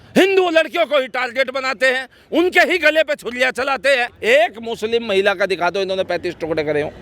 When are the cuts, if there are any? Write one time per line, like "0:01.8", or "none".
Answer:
0:04.1